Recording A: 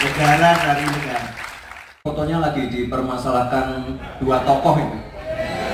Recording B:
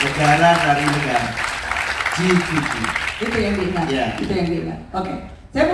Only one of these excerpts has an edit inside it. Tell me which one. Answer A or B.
A